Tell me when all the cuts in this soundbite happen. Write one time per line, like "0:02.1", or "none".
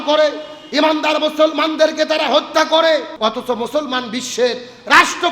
0:03.1

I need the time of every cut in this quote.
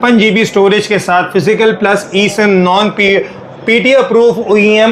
none

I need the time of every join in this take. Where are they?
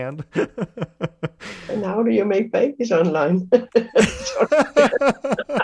0:01.5

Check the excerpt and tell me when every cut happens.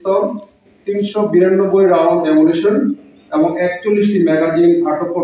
none

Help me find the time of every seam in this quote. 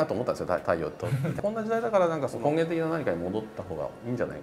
0:01.4
0:02.3

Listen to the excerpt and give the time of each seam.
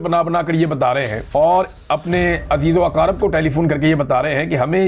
0:01.2

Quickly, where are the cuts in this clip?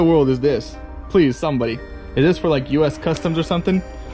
none

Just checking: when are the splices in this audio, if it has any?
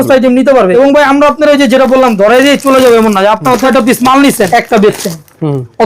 0:00.7
0:03.6
0:04.5

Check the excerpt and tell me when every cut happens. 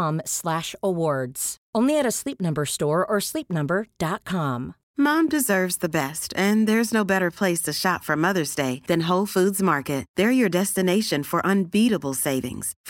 0:04.8

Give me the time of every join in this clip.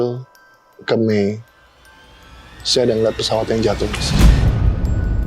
0:04.0

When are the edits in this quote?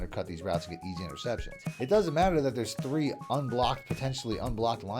0:01.6

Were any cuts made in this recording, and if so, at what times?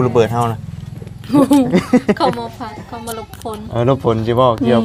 none

